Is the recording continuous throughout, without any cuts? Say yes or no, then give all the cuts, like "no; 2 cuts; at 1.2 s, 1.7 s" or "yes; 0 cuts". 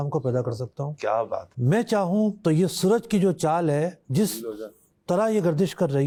yes; 0 cuts